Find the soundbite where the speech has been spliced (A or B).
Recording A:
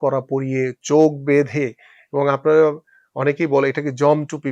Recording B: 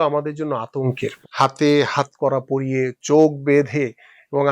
B